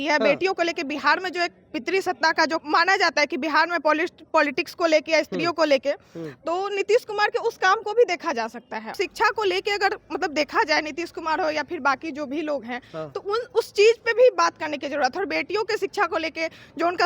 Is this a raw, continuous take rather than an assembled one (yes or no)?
no